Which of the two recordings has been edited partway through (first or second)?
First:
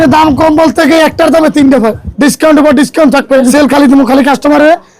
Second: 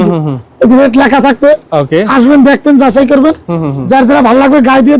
first